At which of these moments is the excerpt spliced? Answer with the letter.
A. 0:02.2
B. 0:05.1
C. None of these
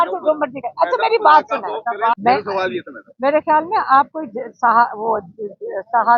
A